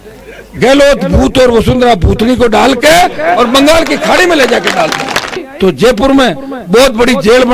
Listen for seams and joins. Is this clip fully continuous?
no; 1 cut; at 5.4 s

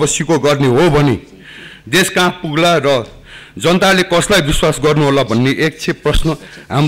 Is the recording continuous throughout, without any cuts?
yes; 0 cuts

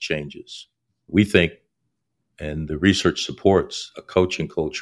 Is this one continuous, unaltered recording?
no; 1 cut; at 2.6 s

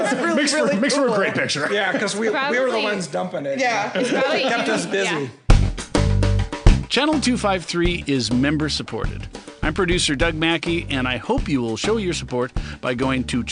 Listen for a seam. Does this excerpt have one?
yes; 1 cut; at 5.4 s

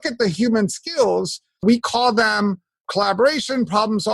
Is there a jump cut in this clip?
yes; 2 cuts; at 1.6 s, 2.9 s

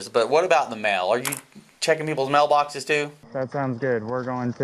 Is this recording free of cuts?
no; 1 cut; at 3.2 s

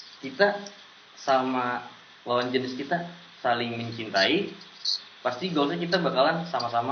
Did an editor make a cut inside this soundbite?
no; 0 cuts

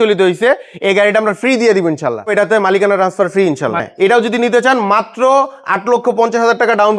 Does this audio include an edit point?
yes; 2 cuts; at 2.3 s, 3.9 s

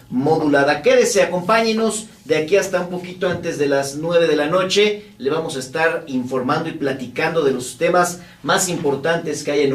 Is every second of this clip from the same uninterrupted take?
no; 1 cut; at 7.5 s

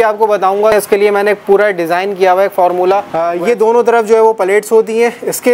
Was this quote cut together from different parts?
yes; 2 cuts; at 0.7 s, 3.2 s

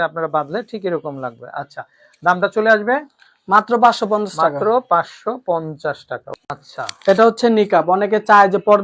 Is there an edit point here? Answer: yes; 1 cut; at 6.6 s

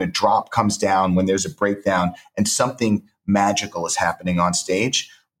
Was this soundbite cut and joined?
no; 0 cuts

